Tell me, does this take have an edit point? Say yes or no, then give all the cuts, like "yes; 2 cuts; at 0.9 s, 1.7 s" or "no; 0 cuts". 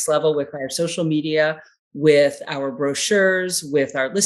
no; 0 cuts